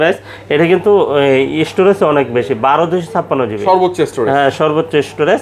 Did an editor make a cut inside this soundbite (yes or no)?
no